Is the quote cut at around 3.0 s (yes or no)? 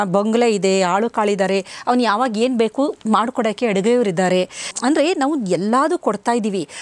no